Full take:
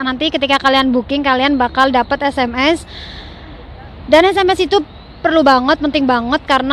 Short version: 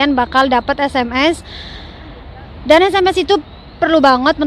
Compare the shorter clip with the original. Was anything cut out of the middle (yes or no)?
no